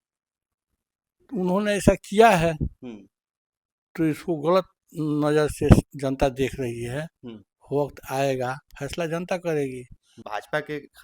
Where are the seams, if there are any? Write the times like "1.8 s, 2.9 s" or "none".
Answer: 10.1 s